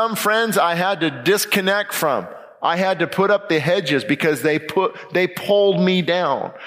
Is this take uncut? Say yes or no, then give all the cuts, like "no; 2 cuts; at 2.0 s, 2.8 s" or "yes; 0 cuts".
yes; 0 cuts